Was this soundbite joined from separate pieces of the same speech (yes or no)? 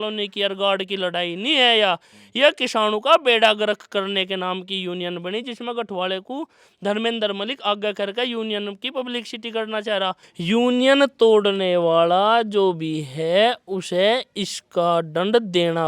yes